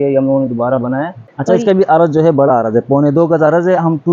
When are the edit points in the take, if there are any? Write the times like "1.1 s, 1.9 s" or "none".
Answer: 1.2 s